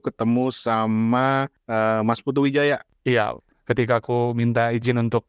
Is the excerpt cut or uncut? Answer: cut